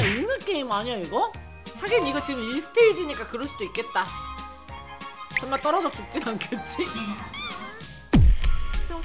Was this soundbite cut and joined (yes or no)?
yes